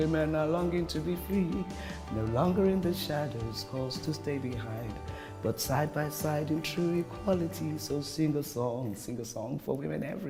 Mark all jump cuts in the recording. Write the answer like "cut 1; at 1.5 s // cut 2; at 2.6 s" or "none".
none